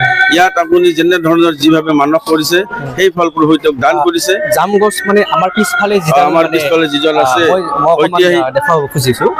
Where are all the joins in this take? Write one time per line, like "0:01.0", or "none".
none